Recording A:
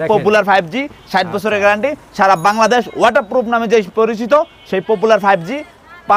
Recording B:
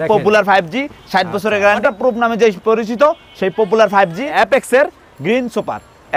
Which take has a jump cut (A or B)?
B